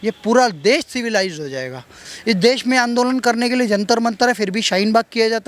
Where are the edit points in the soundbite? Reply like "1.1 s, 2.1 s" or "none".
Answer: 1.9 s